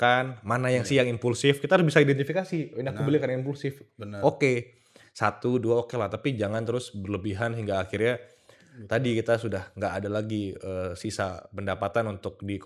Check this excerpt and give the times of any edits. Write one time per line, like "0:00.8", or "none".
none

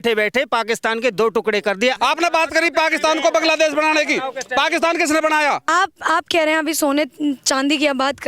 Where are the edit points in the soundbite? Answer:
0:02.0
0:05.6

